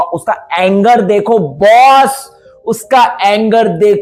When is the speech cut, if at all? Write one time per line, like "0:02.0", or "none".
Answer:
none